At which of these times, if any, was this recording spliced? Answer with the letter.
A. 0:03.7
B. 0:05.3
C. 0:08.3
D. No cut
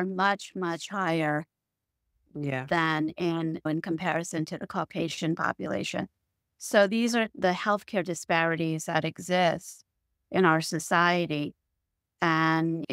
A